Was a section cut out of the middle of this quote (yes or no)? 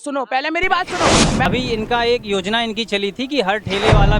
yes